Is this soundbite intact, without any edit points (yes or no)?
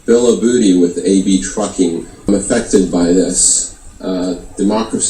no